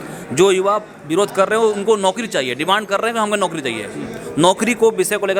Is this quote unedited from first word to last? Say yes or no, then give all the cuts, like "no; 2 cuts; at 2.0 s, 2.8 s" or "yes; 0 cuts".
yes; 0 cuts